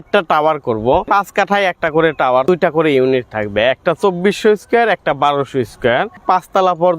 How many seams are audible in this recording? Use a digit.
3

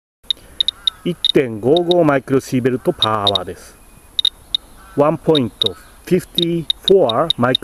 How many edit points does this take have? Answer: 0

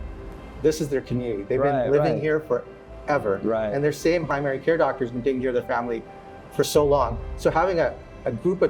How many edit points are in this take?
1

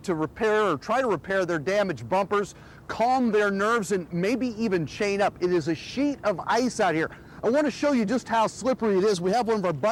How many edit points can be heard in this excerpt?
0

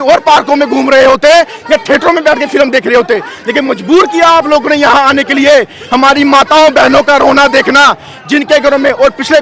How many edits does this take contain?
0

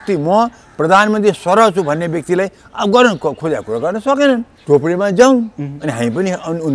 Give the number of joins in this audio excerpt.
1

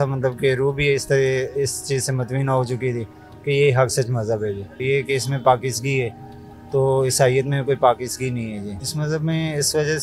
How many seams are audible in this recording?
2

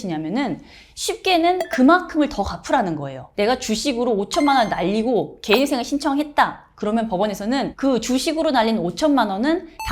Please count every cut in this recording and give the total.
1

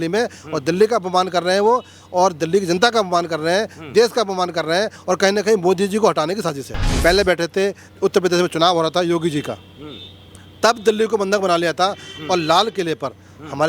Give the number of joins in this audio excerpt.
1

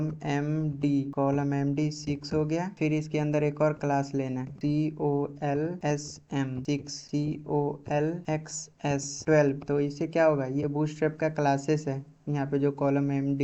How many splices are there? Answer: 1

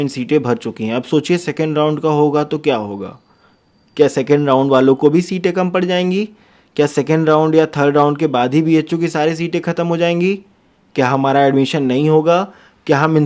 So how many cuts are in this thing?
0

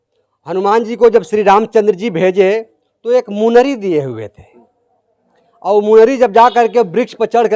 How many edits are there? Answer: 0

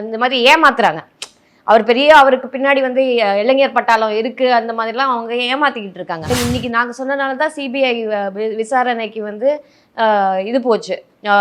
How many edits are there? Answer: 1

